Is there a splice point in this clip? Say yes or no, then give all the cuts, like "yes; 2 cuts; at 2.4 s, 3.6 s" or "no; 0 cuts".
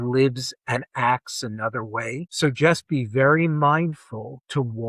no; 0 cuts